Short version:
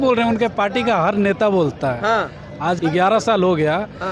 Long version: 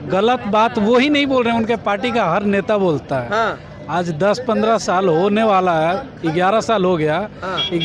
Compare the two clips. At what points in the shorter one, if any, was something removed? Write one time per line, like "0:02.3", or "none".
0:02.8